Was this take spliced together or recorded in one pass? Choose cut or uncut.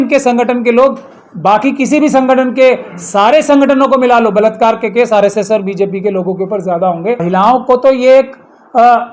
cut